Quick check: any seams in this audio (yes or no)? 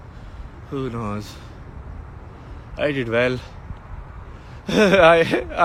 no